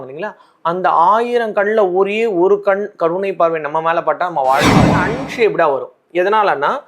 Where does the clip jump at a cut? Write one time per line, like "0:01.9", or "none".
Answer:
0:04.9